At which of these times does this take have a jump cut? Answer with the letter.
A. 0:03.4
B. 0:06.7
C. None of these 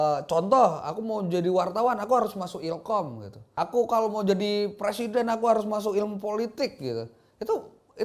A